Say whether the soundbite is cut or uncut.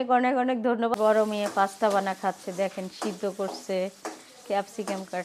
cut